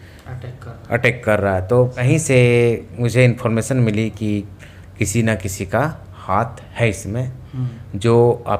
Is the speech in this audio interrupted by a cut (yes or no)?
yes